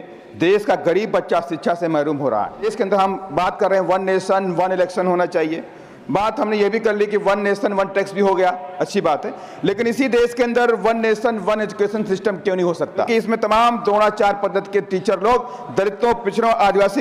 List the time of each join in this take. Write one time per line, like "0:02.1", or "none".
0:02.7
0:13.1